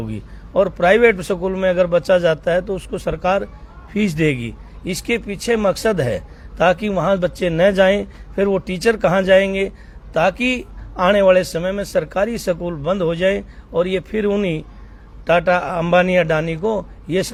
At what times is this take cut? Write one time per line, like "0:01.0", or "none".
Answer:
none